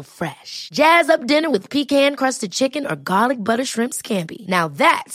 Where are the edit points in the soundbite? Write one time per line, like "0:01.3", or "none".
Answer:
none